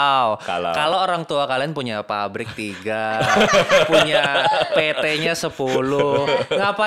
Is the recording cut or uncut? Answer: uncut